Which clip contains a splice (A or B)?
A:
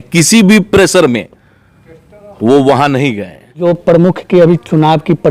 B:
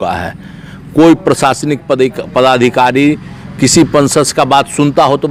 A